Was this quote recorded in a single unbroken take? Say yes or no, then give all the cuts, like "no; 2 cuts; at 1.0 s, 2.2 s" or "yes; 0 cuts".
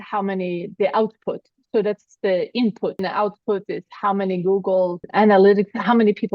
no; 2 cuts; at 3.0 s, 5.0 s